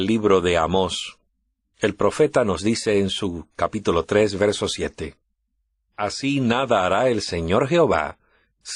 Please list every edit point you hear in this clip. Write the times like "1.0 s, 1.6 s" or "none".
none